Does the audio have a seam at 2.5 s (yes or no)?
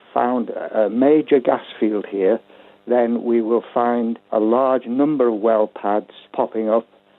no